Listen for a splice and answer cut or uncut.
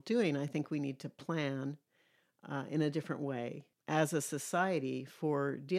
cut